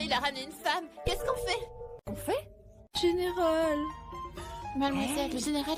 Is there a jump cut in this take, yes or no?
no